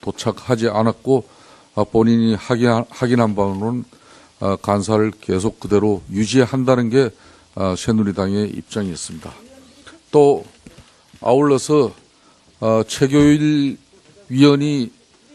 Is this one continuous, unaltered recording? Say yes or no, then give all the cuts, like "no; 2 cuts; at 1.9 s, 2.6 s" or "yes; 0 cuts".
yes; 0 cuts